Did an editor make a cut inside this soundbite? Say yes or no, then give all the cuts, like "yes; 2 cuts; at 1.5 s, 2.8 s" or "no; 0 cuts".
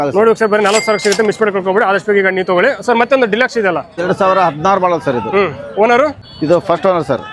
yes; 2 cuts; at 3.9 s, 6.3 s